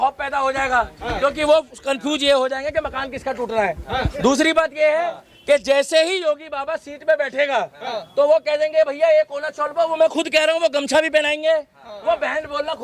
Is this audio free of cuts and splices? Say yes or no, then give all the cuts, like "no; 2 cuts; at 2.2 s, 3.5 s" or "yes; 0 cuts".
yes; 0 cuts